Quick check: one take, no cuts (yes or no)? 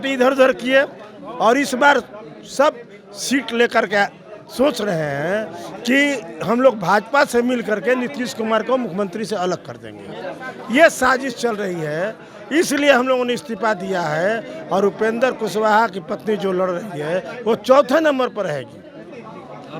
yes